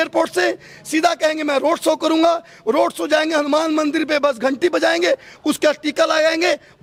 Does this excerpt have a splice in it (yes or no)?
no